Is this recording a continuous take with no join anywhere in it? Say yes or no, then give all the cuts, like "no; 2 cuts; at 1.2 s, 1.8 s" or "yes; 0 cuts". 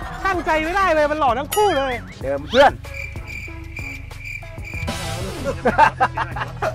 no; 1 cut; at 2.1 s